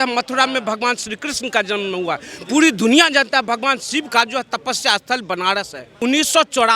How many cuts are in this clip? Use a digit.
1